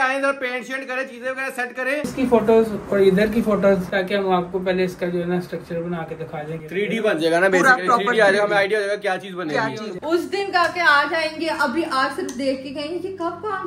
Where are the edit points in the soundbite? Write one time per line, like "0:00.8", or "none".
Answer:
0:02.1
0:03.9
0:06.6
0:09.9